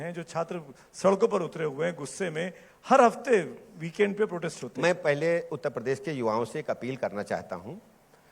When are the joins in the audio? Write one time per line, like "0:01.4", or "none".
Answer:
0:04.9